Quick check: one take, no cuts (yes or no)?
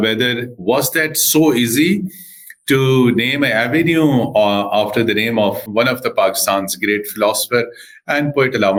yes